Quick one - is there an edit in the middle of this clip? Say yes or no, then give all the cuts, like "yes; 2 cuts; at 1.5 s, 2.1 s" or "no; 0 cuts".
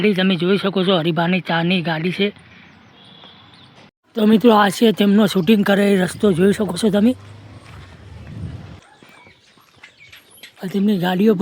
yes; 3 cuts; at 4.2 s, 8.8 s, 10.5 s